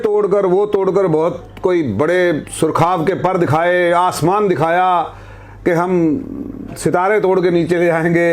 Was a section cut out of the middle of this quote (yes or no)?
no